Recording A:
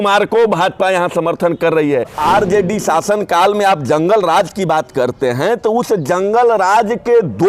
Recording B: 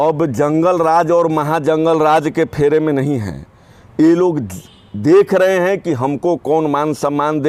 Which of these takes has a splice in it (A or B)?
A